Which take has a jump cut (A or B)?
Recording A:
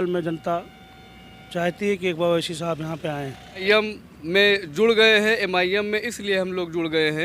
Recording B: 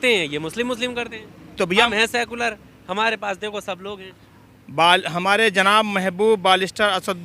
A